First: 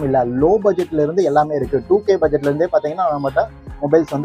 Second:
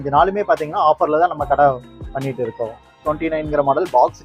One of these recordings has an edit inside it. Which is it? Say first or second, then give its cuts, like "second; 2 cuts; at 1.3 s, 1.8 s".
second; 1 cut; at 3.0 s